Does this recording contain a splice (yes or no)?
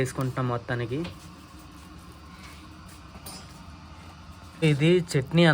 no